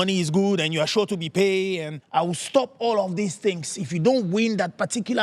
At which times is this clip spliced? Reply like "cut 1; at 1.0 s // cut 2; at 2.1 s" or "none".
cut 1; at 1.9 s